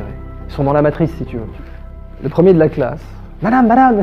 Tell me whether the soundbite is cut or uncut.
cut